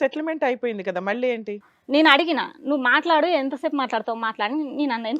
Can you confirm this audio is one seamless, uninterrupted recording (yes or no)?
no